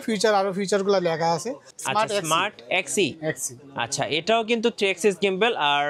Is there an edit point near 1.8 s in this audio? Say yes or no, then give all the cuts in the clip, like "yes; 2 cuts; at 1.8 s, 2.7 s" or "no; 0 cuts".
yes; 1 cut; at 1.8 s